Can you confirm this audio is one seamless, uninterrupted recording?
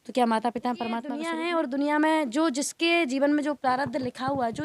no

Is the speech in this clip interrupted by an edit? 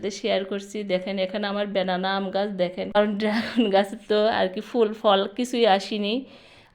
yes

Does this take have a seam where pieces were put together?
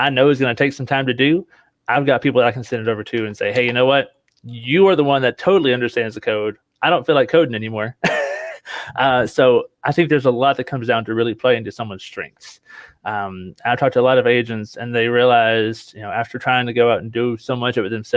no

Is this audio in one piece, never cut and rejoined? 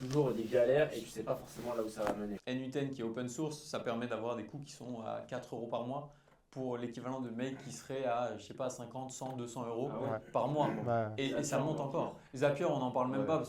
no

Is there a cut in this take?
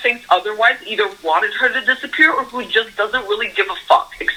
no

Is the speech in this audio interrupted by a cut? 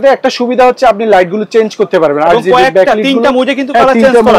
no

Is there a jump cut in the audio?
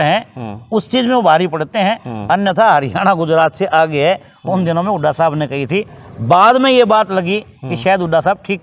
no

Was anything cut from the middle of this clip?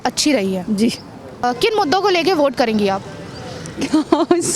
no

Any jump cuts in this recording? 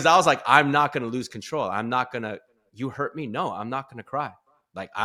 no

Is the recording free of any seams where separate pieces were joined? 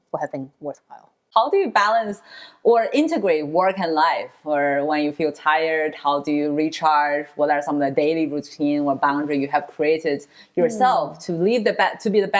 no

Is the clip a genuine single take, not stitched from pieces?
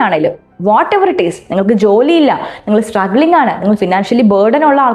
yes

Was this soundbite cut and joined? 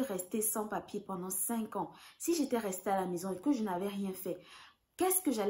no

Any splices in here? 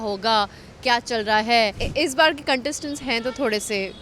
yes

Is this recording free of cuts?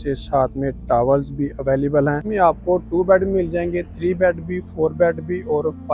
no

